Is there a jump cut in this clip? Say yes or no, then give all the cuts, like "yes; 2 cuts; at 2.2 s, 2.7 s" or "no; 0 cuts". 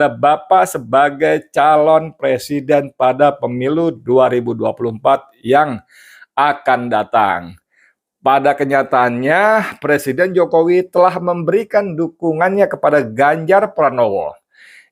no; 0 cuts